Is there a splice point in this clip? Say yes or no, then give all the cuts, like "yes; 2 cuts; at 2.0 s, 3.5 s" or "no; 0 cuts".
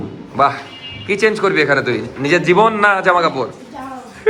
no; 0 cuts